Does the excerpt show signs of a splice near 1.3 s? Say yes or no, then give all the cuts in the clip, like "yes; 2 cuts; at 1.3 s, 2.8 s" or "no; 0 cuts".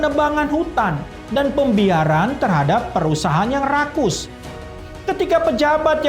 no; 1 cut; at 4.9 s